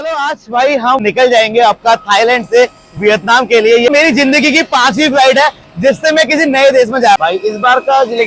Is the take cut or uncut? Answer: cut